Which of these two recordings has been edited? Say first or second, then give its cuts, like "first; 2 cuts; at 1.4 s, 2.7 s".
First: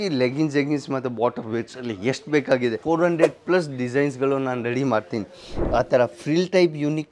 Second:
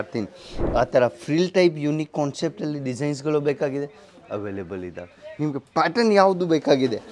first; 1 cut; at 2.8 s